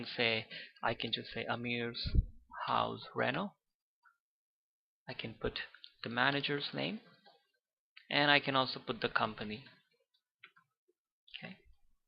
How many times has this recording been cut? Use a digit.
1